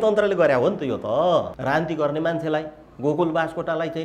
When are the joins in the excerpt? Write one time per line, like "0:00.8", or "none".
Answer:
0:01.5

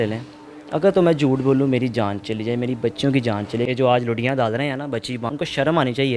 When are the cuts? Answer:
0:03.7
0:05.3

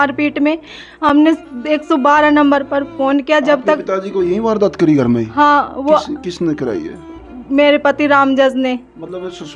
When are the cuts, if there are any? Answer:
none

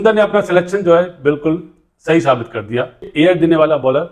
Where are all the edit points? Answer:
none

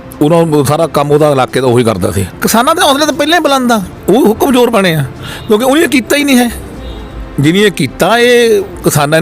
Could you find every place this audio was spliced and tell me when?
0:02.3

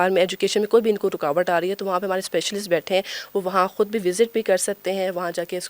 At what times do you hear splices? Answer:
none

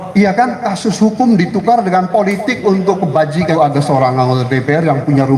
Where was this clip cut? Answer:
0:03.5

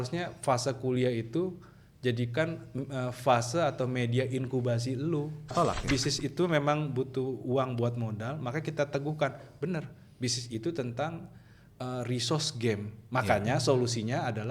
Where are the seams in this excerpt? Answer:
0:05.5

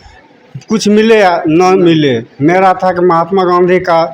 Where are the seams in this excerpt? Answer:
none

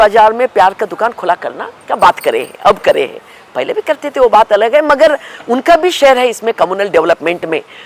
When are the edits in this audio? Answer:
none

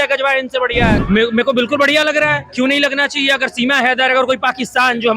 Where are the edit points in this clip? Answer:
0:00.9

